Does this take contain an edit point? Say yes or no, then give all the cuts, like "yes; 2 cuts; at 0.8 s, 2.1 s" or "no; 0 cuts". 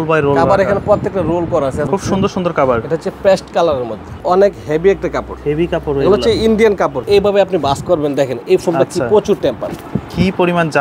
yes; 4 cuts; at 1.9 s, 4.1 s, 7.0 s, 9.7 s